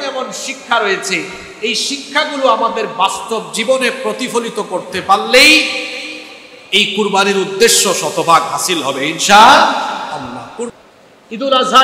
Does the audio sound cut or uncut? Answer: cut